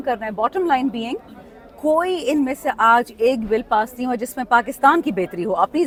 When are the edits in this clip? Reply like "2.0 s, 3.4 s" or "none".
none